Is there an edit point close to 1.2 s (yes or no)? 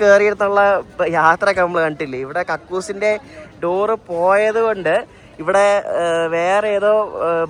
no